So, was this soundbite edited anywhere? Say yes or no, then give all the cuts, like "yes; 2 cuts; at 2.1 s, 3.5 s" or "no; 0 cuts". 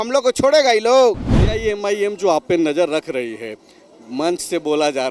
yes; 1 cut; at 1.3 s